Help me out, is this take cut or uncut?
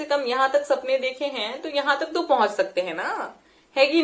uncut